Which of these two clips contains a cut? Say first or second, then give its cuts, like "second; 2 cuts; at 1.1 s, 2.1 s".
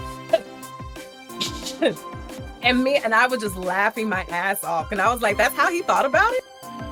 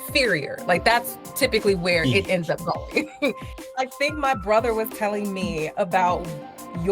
second; 1 cut; at 3.5 s